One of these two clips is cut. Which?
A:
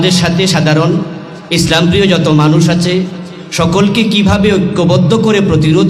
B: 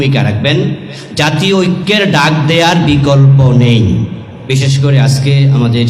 B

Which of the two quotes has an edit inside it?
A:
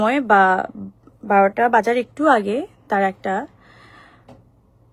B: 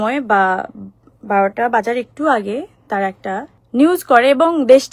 B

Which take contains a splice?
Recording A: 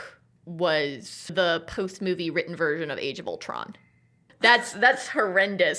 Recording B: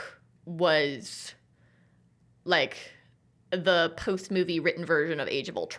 A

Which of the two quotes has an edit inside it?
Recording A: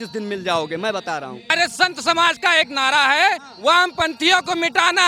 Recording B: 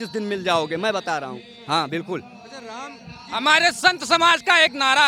A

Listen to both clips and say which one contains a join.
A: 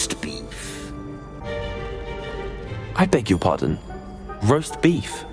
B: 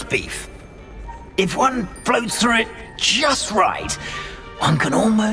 A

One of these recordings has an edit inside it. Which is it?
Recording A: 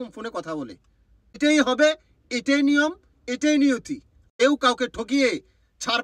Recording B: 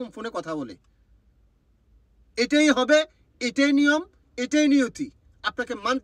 A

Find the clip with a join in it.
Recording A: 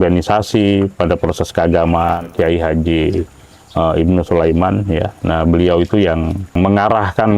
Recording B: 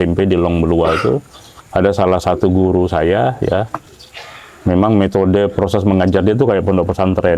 A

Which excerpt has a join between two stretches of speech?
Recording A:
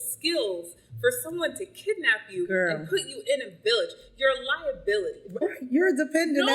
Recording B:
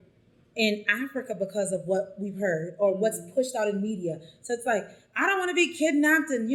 A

